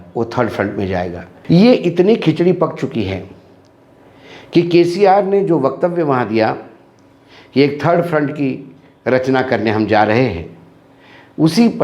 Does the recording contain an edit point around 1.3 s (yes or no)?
yes